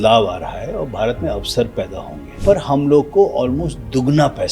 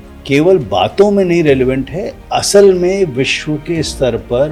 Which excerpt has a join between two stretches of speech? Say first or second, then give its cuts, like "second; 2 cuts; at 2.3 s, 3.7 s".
first; 1 cut; at 2.2 s